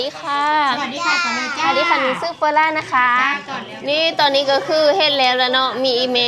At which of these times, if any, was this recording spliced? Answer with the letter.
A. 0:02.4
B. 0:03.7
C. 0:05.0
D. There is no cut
B